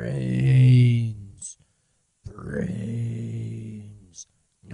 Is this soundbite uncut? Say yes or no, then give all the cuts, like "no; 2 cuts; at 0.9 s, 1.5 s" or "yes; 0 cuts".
yes; 0 cuts